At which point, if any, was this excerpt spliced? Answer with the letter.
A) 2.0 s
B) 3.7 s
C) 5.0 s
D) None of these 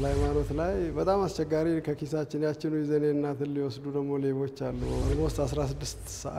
C